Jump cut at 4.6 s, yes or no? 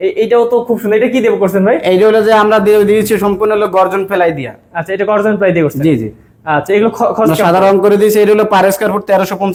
no